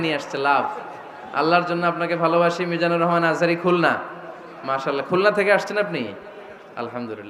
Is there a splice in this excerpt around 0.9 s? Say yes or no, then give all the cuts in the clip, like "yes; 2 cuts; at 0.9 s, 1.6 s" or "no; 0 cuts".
no; 0 cuts